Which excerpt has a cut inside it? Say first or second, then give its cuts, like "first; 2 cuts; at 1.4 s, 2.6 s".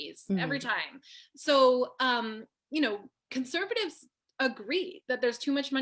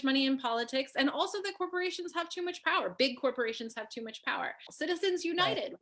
second; 1 cut; at 4.7 s